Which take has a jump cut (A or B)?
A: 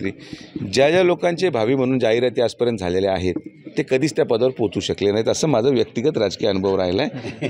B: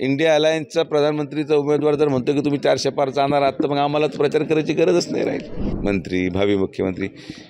B